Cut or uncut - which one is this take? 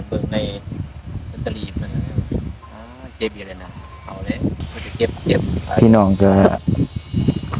cut